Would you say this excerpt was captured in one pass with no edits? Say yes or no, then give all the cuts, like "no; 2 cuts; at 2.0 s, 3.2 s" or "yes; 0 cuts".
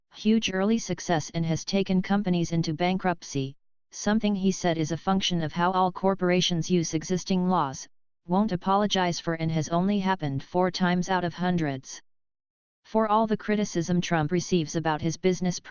yes; 0 cuts